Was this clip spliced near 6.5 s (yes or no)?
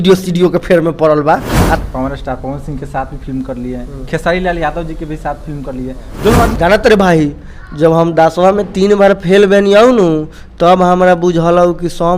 yes